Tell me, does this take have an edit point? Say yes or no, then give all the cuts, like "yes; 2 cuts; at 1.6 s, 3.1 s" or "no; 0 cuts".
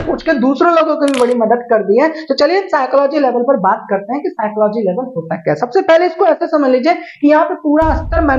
no; 0 cuts